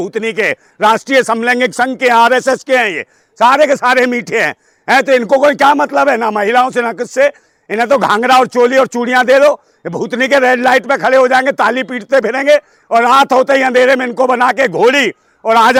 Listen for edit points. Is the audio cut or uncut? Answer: uncut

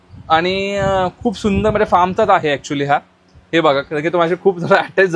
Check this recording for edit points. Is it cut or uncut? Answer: uncut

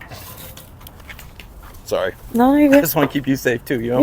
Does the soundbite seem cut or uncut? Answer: cut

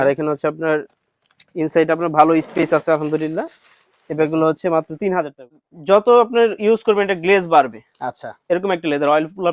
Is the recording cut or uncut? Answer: cut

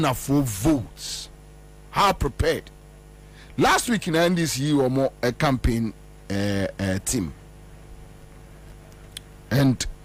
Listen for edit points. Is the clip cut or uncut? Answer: uncut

